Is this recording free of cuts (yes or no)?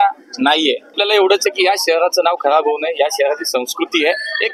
no